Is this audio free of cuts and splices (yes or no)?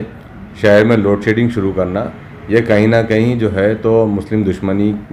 yes